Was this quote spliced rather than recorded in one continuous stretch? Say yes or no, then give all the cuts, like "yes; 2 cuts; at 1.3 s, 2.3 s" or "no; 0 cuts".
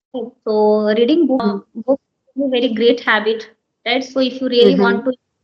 yes; 1 cut; at 1.4 s